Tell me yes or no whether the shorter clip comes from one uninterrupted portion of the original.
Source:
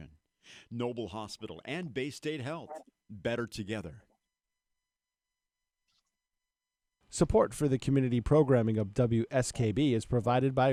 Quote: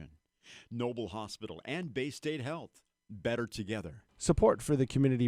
no